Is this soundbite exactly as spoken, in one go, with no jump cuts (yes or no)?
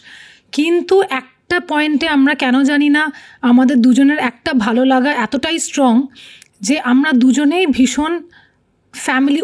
yes